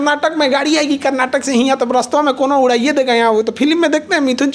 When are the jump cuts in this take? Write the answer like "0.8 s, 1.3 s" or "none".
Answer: none